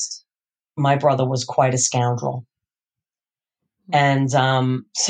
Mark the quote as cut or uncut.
uncut